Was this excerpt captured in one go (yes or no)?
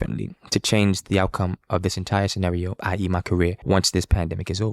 no